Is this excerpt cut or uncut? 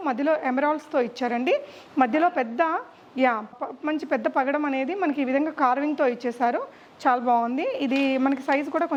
uncut